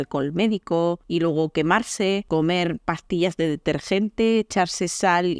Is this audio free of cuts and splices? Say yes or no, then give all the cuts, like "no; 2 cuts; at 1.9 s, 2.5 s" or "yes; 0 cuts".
no; 2 cuts; at 1.0 s, 2.2 s